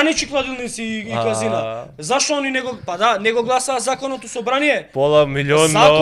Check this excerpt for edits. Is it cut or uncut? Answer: uncut